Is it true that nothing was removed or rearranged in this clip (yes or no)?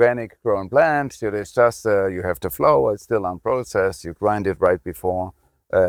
yes